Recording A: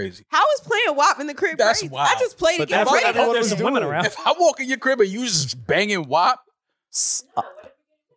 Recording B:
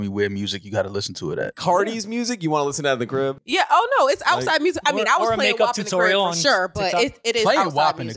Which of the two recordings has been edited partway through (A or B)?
B